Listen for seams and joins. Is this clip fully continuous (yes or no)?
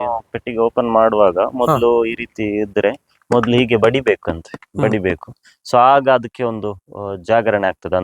yes